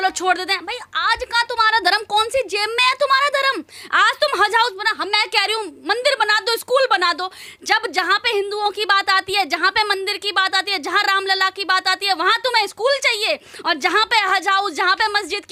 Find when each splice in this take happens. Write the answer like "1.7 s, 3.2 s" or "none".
none

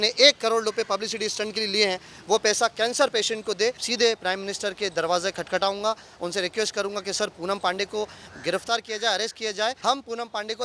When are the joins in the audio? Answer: 3.8 s, 9.8 s

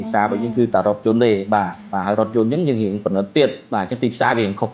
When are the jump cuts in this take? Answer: 1.8 s

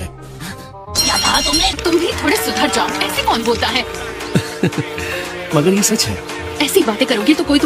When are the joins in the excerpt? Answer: 1.8 s

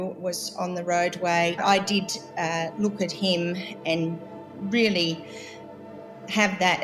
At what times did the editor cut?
1.6 s

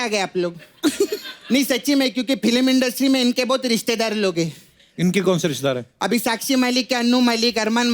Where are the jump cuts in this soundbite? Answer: none

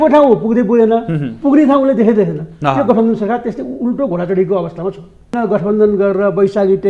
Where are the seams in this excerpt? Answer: 5.4 s

